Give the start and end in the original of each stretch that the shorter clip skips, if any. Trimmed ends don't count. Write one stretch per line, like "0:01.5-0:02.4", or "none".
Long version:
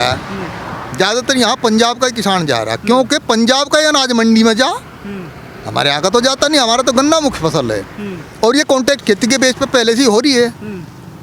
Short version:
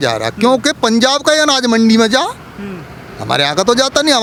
none